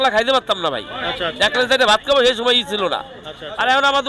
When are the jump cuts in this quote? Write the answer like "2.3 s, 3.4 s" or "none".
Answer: none